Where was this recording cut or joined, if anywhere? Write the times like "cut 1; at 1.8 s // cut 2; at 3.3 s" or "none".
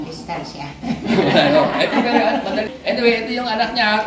cut 1; at 2.7 s